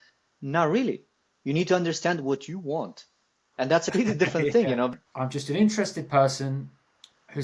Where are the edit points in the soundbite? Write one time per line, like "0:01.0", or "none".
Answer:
0:03.9
0:04.9